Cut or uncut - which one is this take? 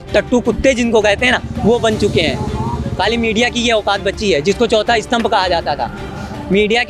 uncut